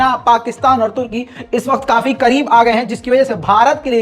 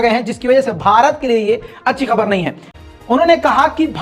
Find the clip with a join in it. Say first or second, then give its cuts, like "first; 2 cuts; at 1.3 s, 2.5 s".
second; 1 cut; at 2.6 s